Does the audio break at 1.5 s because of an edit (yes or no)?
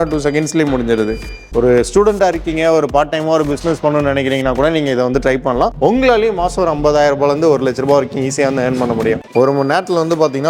yes